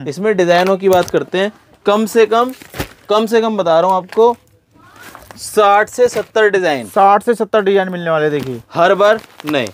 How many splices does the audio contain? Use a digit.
0